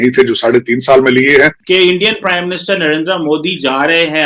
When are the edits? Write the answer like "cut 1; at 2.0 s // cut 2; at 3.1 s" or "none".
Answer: cut 1; at 1.6 s